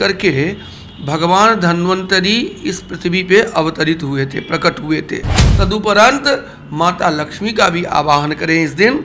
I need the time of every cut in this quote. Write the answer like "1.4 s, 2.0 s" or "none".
5.4 s